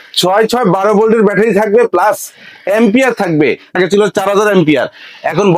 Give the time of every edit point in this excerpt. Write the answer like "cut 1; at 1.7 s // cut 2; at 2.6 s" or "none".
cut 1; at 3.7 s